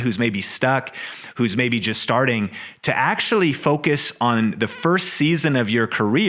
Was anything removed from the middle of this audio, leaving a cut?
no; 0 cuts

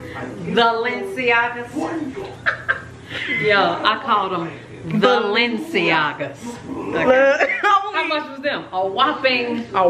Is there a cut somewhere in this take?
no; 0 cuts

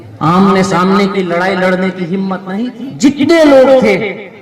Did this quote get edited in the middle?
yes; 1 cut; at 2.4 s

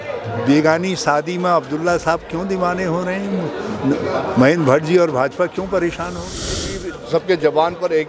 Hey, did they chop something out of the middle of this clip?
yes; 1 cut; at 6.6 s

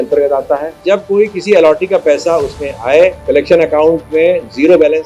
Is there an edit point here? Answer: yes; 2 cuts; at 0.8 s, 3.2 s

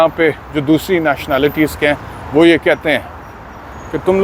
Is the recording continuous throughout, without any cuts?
yes; 0 cuts

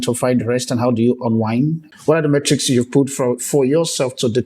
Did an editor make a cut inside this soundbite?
yes; 1 cut; at 1.8 s

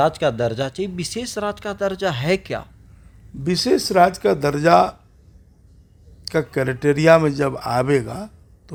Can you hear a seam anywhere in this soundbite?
no; 0 cuts

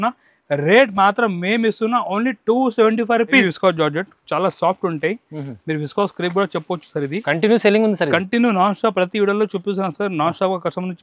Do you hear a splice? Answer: yes; 1 cut; at 3.5 s

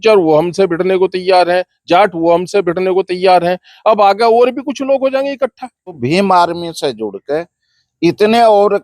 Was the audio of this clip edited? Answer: yes; 1 cut; at 6.0 s

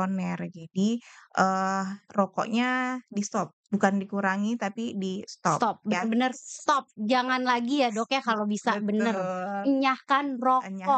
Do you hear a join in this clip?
no; 0 cuts

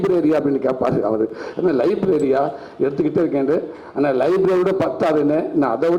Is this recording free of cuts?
yes; 0 cuts

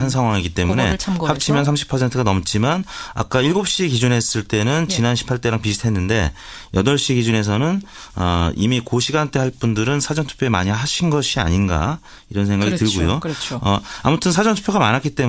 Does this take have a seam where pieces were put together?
yes; 1 cut; at 9.5 s

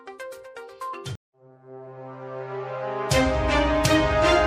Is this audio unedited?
yes; 0 cuts

